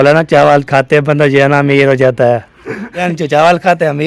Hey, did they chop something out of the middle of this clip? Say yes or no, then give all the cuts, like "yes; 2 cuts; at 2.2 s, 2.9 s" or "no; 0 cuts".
yes; 1 cut; at 3.0 s